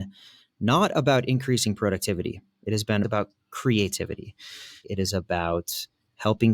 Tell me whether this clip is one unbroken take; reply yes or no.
no